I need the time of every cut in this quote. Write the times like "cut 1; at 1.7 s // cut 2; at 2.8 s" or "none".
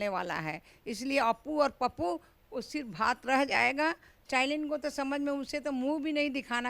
cut 1; at 4.1 s